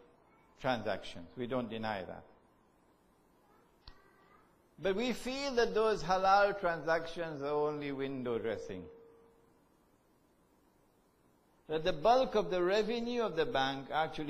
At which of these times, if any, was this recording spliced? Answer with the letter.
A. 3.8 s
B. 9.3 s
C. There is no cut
B